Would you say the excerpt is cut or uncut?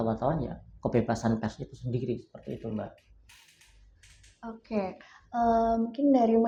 uncut